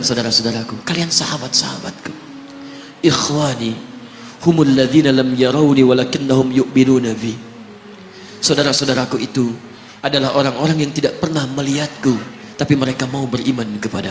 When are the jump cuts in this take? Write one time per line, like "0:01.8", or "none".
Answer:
none